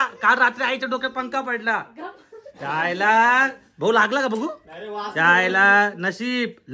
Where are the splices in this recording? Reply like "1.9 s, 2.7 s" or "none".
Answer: none